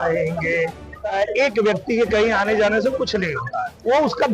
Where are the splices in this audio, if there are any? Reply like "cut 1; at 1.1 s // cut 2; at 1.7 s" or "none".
cut 1; at 1.1 s